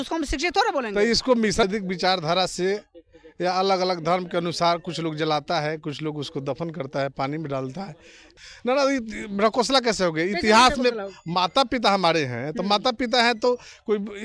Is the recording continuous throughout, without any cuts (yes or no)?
no